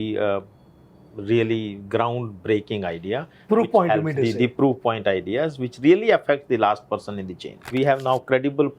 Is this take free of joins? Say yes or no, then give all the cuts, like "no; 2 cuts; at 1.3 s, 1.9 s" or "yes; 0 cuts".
no; 1 cut; at 7.7 s